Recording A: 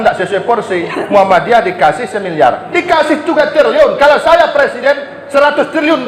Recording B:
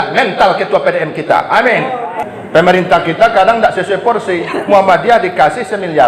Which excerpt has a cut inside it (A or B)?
B